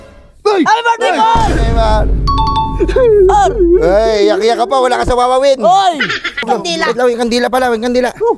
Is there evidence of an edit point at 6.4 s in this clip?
yes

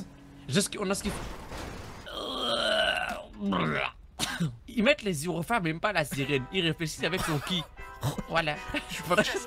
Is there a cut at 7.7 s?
no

